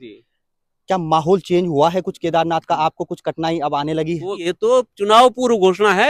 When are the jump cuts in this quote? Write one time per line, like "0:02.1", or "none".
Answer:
0:04.4